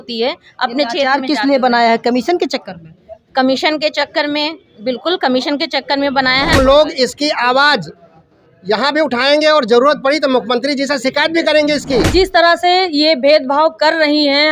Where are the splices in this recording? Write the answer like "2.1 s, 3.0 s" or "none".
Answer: 6.5 s, 12.1 s